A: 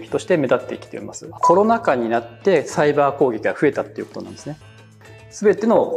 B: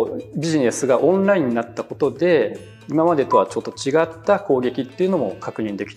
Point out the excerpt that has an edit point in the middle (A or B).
A